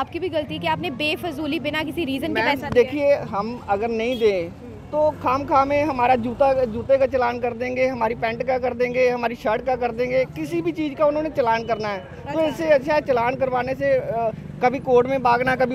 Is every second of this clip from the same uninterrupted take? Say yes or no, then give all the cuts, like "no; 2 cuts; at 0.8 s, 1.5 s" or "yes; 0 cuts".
yes; 0 cuts